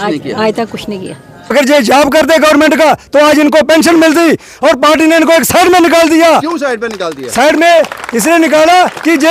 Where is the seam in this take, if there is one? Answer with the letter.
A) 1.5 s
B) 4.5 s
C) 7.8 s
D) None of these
A